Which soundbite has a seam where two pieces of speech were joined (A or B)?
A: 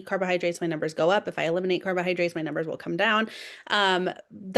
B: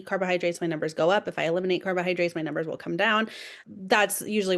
B